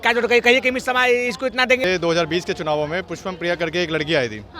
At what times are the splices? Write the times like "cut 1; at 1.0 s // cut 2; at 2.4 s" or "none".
cut 1; at 1.8 s